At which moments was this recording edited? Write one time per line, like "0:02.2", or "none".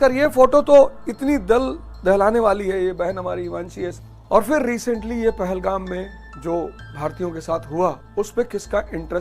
0:03.9
0:06.2
0:06.8
0:08.0